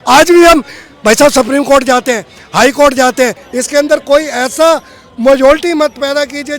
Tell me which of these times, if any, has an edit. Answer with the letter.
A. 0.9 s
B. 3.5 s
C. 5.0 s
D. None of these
B